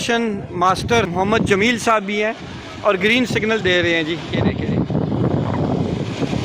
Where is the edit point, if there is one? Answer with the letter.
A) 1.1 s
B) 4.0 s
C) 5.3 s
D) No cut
A